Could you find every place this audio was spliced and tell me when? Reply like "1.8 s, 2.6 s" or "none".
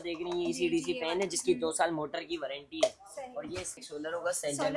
3.8 s